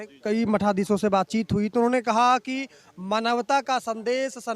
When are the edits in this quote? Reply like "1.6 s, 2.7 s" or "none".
none